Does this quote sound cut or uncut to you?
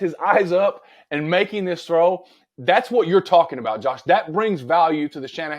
uncut